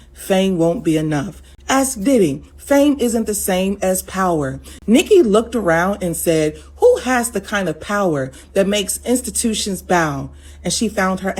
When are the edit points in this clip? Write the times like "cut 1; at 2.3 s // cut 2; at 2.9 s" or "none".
none